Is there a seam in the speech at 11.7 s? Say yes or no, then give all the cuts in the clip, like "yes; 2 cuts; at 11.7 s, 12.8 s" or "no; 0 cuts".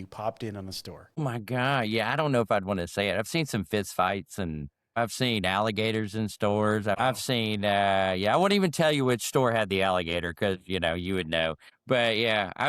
yes; 4 cuts; at 1.2 s, 4.9 s, 7.0 s, 11.7 s